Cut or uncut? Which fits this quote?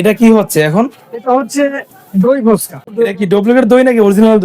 cut